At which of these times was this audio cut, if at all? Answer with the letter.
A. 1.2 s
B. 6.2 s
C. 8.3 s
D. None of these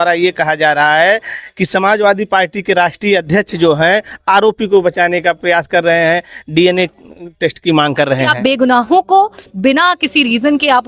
C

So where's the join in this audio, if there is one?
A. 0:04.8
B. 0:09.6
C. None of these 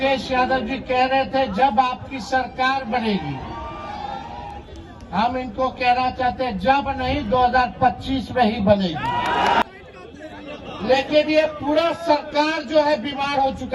B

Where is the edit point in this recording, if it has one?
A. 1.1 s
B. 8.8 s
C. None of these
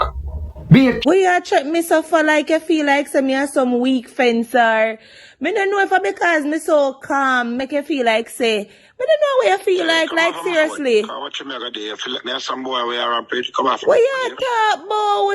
A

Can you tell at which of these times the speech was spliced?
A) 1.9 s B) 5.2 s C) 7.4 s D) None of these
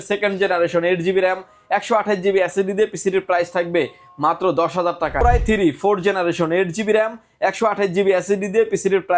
B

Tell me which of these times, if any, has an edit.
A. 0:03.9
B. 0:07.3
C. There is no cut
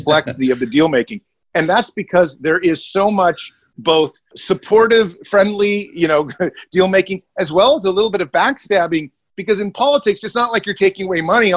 A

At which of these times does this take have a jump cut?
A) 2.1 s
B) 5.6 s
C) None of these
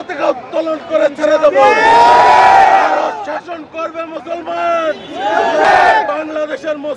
B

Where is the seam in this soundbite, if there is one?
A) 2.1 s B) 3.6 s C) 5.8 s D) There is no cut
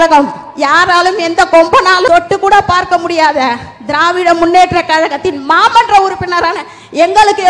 A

